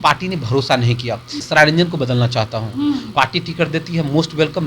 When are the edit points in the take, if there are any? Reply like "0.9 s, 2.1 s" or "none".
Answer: 1.4 s, 3.1 s